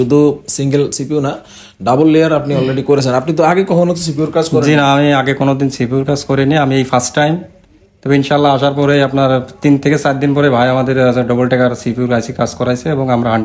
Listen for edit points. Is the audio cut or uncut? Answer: uncut